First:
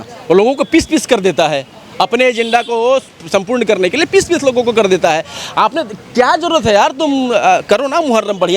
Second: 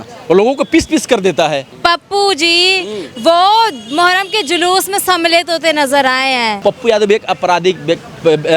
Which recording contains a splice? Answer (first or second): second